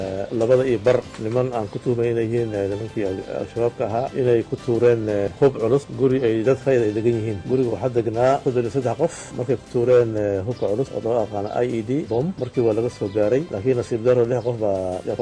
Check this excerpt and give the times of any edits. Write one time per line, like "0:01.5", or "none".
0:01.1
0:05.3
0:09.3
0:13.5